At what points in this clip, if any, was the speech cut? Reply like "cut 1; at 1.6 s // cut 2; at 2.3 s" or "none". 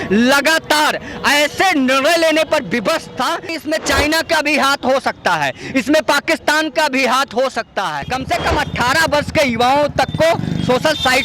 cut 1; at 3.6 s // cut 2; at 8.1 s